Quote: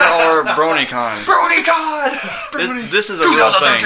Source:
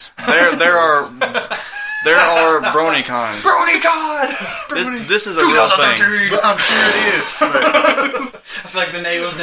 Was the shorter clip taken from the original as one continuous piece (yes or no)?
yes